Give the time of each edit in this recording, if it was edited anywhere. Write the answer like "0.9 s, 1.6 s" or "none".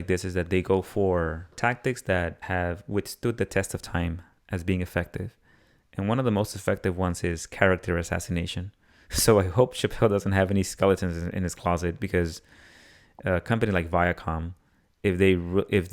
1.5 s, 2.4 s